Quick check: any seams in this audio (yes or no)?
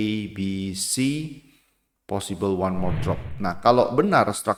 no